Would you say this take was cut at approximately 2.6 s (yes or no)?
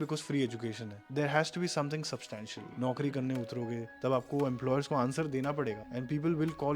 yes